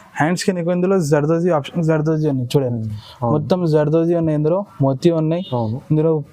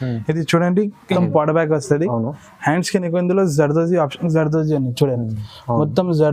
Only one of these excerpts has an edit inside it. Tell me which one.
second; 1 cut; at 1.2 s

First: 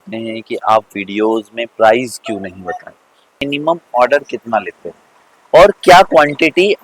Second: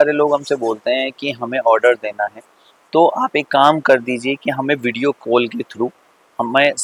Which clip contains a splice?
first; 1 cut; at 3.3 s

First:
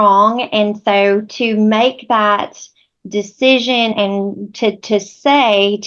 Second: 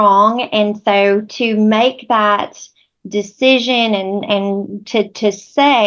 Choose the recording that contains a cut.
first; 1 cut; at 3.9 s

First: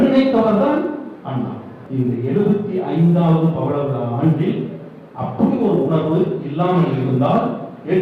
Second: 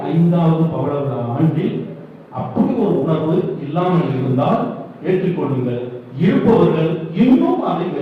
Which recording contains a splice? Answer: first; 1 cut; at 1.8 s

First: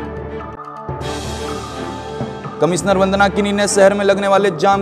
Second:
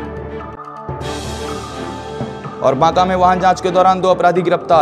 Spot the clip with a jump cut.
first; 1 cut; at 2.4 s

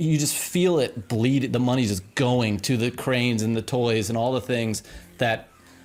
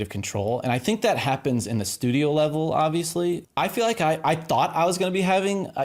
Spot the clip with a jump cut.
second; 1 cut; at 3.4 s

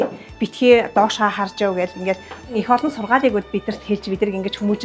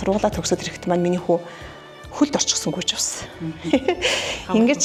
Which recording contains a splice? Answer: first; 1 cut; at 2.5 s

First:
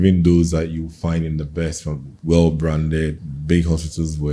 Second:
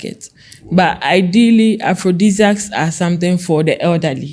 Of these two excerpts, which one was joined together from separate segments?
first; 1 cut; at 3.3 s

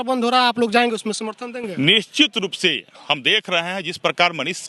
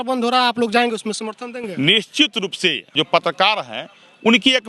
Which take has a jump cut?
second; 1 cut; at 2.9 s

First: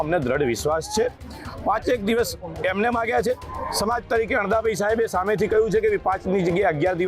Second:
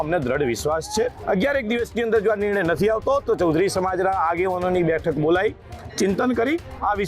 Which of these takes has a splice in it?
second; 1 cut; at 1.2 s

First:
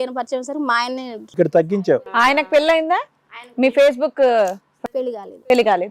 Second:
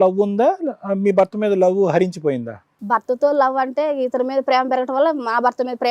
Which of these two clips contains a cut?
first; 1 cut; at 1.2 s

